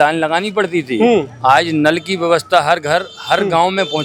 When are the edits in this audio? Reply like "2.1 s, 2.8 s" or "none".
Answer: none

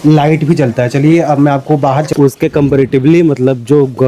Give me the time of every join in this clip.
2.1 s

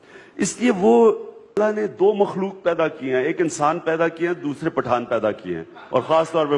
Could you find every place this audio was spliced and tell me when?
1.6 s

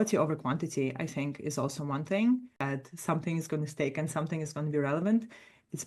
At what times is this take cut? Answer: 2.6 s

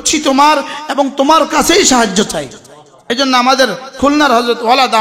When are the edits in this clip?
2.9 s

